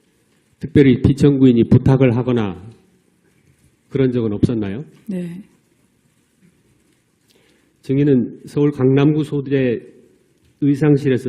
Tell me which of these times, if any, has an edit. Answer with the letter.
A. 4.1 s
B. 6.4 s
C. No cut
A